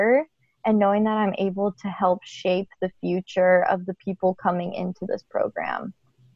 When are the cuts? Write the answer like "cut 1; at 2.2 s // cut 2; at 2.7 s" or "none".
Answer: none